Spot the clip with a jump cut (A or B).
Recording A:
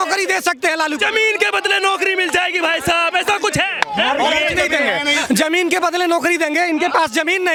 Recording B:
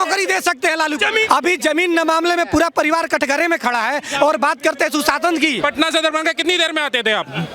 B